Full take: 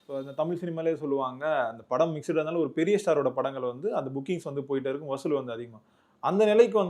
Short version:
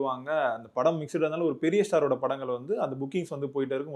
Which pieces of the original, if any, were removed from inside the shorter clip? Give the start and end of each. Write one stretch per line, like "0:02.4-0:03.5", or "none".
none